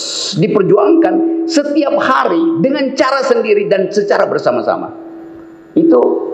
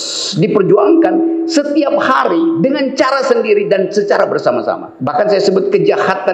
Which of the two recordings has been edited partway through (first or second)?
second